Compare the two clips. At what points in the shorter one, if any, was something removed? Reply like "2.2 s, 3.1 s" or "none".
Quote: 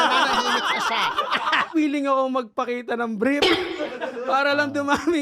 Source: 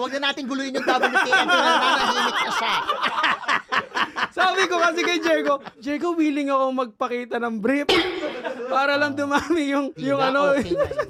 1.7 s

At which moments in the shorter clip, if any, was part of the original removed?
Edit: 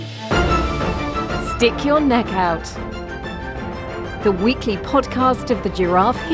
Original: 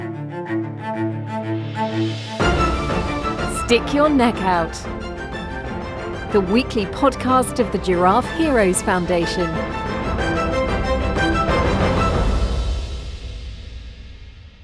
none

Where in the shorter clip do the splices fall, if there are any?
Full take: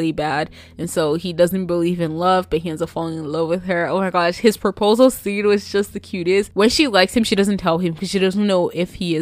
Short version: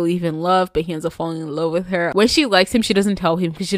2.1 s

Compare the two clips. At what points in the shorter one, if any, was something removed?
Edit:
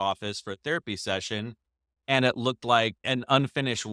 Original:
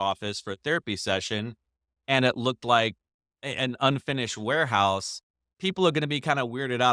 3.0 s

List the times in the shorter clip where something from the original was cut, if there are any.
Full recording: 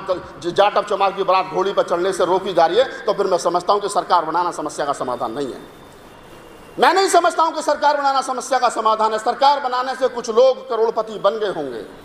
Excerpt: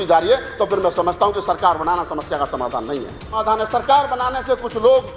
3.3 s

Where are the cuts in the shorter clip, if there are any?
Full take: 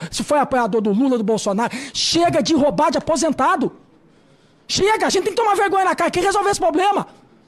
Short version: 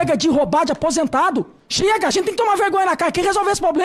1.6 s

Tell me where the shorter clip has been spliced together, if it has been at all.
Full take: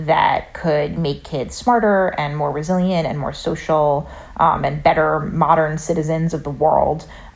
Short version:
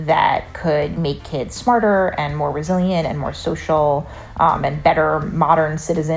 none

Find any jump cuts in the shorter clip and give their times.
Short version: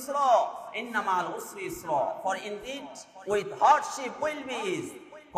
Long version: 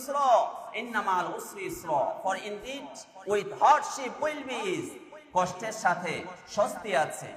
none

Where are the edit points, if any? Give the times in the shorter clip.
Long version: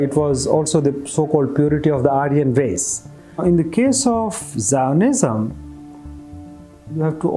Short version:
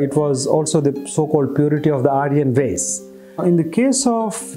none

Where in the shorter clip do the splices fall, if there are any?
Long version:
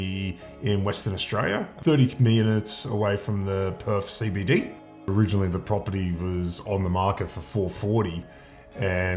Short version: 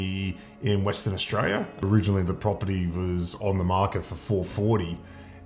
1.7 s

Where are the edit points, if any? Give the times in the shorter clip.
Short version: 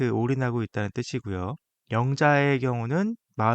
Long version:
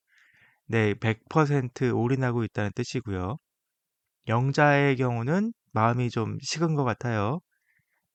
1.7 s

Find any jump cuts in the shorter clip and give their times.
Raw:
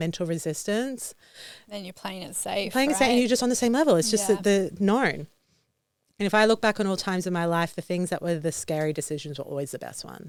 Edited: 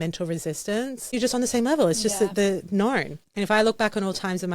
1.1 s, 3.2 s

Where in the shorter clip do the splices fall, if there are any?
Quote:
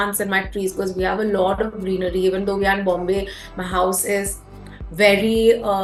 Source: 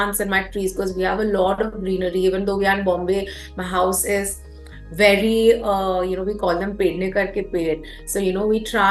none

